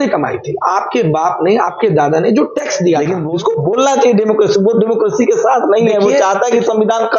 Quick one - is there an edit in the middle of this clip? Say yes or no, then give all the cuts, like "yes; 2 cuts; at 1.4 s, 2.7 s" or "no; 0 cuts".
yes; 1 cut; at 3.2 s